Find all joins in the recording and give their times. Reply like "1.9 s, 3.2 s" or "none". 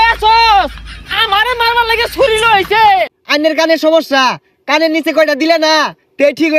3.2 s